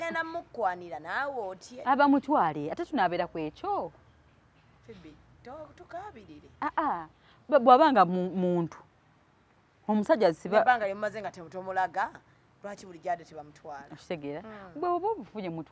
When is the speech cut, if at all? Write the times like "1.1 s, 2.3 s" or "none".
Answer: none